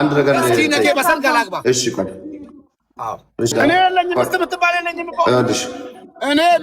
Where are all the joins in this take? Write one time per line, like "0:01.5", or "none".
0:03.5